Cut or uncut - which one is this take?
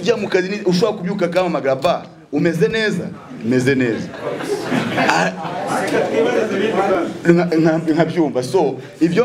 uncut